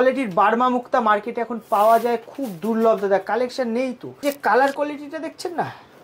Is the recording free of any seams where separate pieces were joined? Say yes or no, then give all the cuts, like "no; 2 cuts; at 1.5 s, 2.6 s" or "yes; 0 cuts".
no; 1 cut; at 4.2 s